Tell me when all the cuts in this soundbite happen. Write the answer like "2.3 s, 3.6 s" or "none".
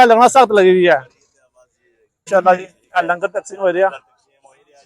2.3 s